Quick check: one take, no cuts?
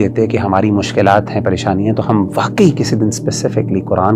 yes; 0 cuts

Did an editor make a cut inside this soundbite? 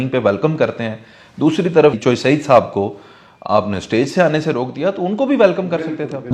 no; 0 cuts

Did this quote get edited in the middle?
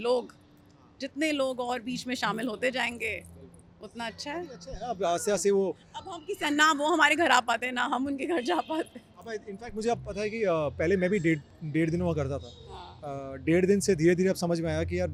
no; 0 cuts

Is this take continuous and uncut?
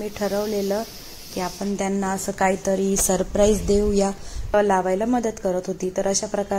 no; 1 cut; at 4.5 s

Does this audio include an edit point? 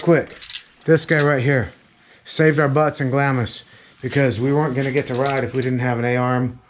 no; 0 cuts

